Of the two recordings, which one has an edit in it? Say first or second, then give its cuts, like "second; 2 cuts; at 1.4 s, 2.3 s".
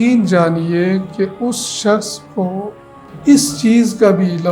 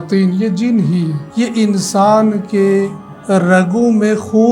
second; 1 cut; at 1.2 s